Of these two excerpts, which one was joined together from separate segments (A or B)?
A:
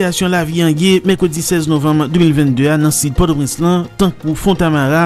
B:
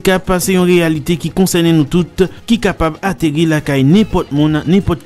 B